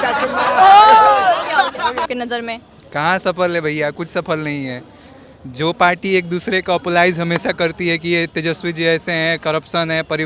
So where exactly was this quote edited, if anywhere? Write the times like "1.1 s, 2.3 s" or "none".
none